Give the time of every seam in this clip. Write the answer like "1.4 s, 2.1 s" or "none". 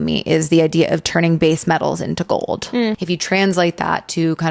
3.0 s